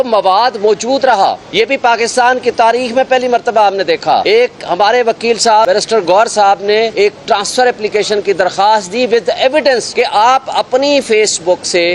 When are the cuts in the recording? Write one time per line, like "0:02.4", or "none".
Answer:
0:01.4
0:04.2
0:05.7
0:06.9
0:09.9